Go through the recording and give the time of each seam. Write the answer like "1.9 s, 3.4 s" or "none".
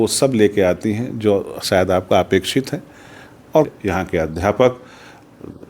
3.7 s